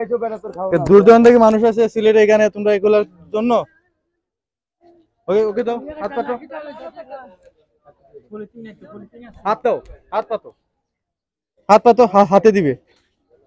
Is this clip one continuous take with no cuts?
yes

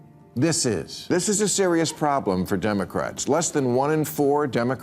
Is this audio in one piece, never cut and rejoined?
no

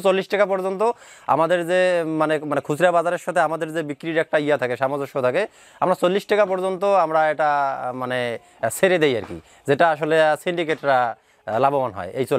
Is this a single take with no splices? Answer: yes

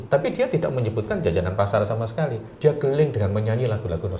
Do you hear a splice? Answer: no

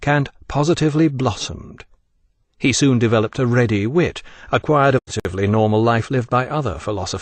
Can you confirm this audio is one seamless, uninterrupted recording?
yes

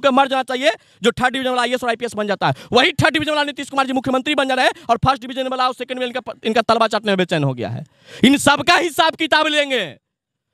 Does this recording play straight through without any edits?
yes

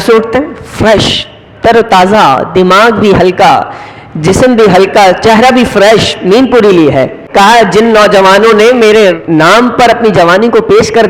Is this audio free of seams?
no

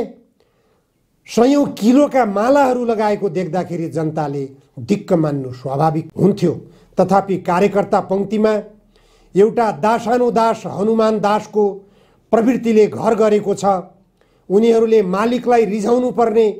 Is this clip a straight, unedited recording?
yes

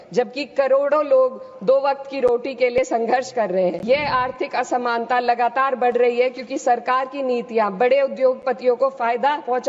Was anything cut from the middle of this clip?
yes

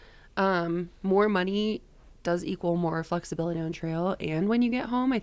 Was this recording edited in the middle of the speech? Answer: no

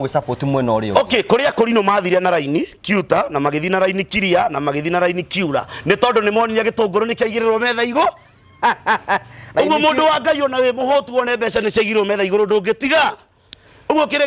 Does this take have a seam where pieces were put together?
no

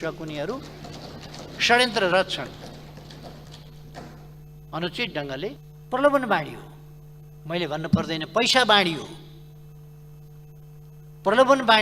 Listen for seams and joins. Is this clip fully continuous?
no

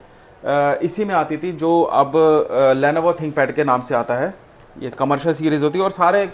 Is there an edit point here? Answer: no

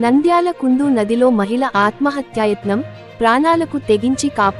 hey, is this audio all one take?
yes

